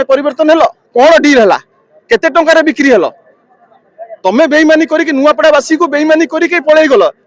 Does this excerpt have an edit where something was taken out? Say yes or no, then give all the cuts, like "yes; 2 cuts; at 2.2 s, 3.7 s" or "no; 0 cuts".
no; 0 cuts